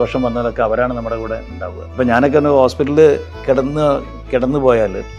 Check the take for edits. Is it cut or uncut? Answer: cut